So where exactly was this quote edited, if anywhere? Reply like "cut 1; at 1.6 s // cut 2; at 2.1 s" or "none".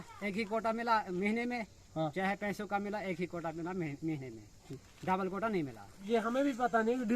cut 1; at 6.0 s